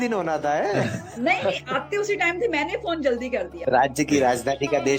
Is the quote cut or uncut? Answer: cut